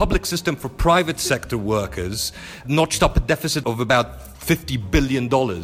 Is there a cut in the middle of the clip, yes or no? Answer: yes